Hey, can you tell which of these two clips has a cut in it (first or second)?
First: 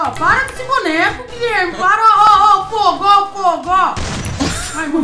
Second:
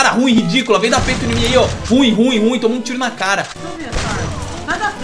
second